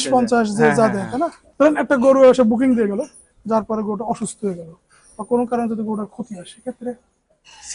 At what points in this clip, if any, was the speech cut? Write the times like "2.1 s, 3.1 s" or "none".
1.4 s

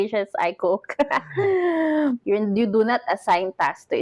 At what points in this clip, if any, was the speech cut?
2.2 s

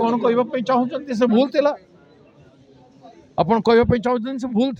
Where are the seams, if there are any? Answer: none

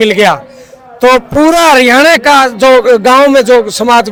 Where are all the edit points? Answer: none

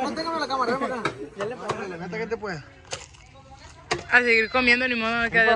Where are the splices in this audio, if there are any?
1.6 s

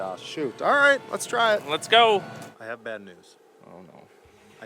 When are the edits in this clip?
2.4 s

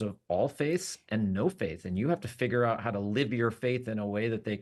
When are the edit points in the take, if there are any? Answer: none

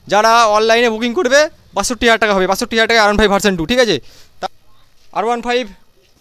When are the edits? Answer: none

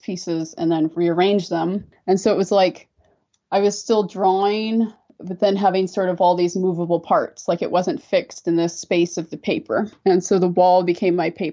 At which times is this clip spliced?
none

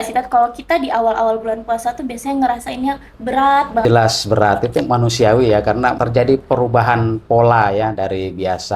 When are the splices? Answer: 3.8 s, 6.0 s

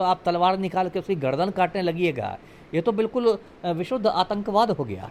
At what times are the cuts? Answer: none

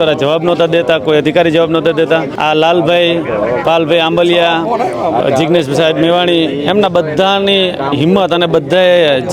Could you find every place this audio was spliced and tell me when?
2.3 s

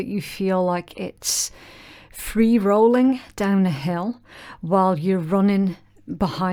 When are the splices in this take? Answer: none

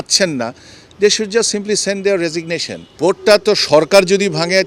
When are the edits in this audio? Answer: 2.9 s

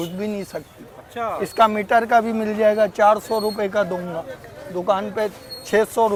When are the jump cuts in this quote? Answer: none

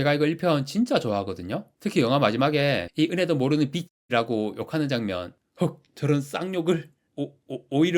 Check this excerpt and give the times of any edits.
5.3 s

